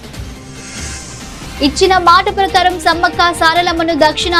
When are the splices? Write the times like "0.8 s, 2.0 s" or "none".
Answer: none